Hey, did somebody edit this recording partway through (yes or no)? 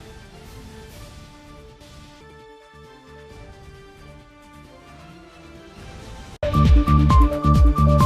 no